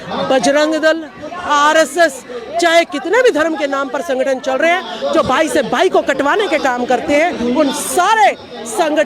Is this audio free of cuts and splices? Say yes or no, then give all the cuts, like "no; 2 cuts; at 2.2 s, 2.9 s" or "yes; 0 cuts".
yes; 0 cuts